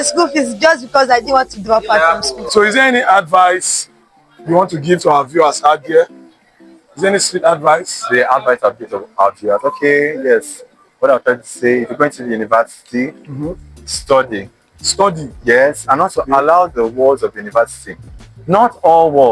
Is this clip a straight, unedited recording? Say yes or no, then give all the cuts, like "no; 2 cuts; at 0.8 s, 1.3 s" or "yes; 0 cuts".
no; 1 cut; at 2.3 s